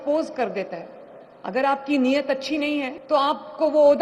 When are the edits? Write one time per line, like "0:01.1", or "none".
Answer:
0:03.0